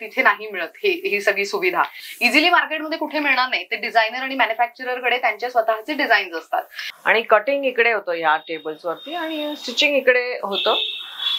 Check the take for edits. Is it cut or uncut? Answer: cut